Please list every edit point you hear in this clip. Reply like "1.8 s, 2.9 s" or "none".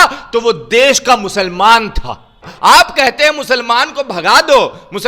2.5 s